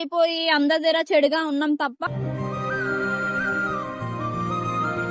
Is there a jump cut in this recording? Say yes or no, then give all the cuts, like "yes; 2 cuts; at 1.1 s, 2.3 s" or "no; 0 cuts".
no; 0 cuts